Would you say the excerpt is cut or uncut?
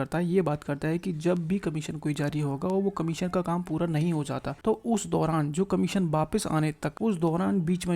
cut